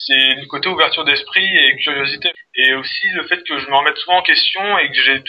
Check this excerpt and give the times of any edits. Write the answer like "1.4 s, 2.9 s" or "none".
2.2 s